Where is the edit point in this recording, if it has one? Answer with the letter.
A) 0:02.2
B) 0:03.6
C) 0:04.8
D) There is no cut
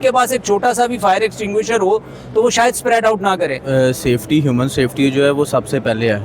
B